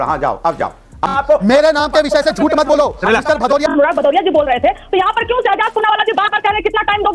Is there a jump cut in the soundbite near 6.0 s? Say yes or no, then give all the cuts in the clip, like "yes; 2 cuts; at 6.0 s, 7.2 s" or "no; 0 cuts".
no; 2 cuts; at 1.1 s, 3.7 s